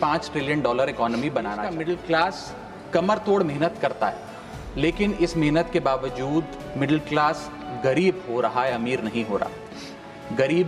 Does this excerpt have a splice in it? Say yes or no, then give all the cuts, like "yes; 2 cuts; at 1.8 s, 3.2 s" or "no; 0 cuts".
yes; 1 cut; at 1.8 s